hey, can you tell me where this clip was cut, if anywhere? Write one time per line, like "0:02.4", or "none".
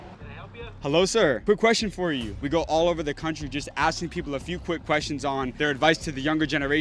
0:02.3